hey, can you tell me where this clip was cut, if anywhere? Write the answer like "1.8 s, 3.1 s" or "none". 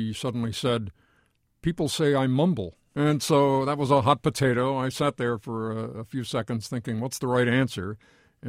2.8 s